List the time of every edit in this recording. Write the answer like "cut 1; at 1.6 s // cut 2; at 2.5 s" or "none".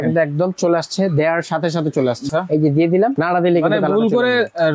cut 1; at 2.3 s